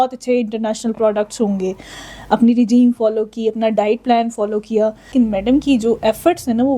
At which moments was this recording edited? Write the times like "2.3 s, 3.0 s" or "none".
5.0 s